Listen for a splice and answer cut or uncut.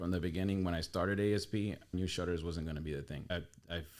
cut